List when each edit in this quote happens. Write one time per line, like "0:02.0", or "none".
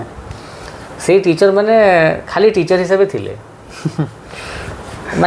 none